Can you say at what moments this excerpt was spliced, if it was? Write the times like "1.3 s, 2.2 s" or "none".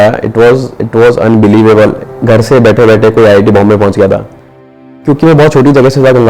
2.1 s, 5.0 s